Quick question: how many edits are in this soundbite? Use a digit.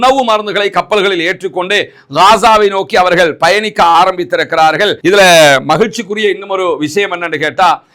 1